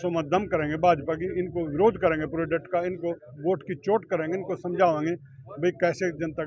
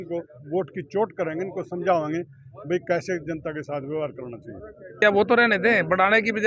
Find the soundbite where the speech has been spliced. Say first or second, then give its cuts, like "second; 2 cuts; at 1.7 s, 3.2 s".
second; 1 cut; at 5.0 s